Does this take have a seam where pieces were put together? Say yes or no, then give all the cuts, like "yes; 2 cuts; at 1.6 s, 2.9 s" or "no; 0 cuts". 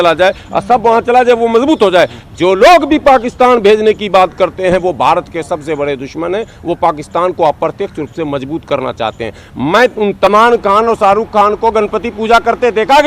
yes; 1 cut; at 10.3 s